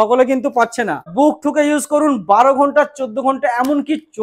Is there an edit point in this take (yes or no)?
yes